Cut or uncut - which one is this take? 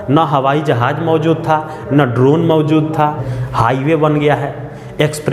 cut